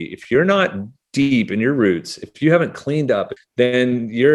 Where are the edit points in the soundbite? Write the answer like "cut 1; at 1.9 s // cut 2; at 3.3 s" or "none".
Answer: cut 1; at 3.4 s